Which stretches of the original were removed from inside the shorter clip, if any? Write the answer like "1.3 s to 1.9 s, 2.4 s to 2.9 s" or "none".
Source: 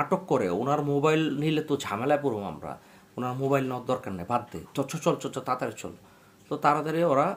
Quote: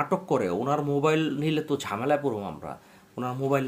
none